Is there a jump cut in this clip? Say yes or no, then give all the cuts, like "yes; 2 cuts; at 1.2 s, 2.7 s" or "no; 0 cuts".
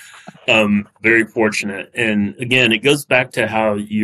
yes; 2 cuts; at 1.0 s, 2.4 s